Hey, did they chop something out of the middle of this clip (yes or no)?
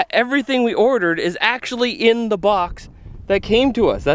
no